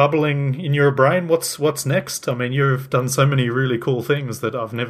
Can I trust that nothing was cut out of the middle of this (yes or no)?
yes